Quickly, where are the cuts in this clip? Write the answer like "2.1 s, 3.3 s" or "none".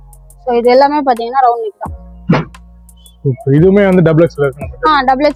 none